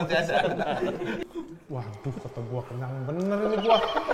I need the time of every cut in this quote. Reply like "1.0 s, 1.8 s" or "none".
1.2 s